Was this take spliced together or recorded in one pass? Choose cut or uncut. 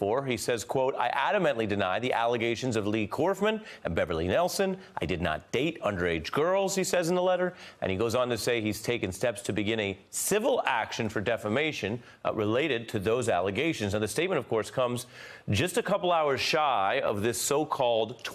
uncut